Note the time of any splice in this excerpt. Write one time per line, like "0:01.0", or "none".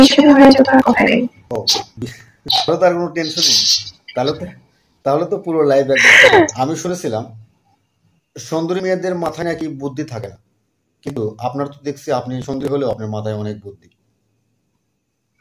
0:02.7
0:06.5